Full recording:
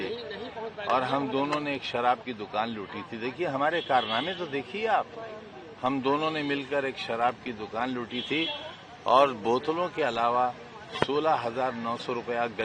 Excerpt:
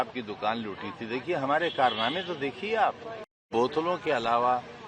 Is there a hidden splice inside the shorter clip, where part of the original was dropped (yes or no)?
yes